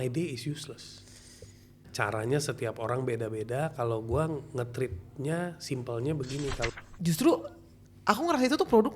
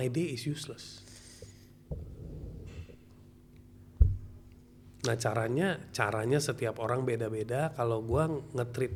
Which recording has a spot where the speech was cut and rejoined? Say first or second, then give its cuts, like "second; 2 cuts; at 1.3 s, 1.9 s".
first; 2 cuts; at 1.9 s, 6.8 s